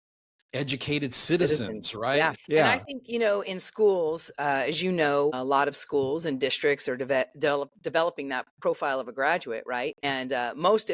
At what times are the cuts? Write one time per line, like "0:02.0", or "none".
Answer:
0:02.4
0:05.3
0:10.0